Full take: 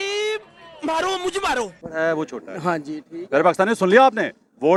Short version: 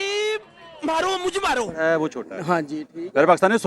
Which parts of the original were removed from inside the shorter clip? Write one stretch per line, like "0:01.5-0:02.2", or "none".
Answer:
0:01.7-0:01.9